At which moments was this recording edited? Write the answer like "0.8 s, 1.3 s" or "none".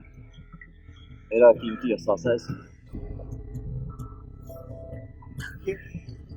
2.9 s